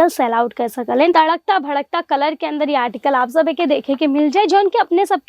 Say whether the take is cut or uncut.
cut